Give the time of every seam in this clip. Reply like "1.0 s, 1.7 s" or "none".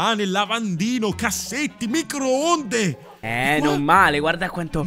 none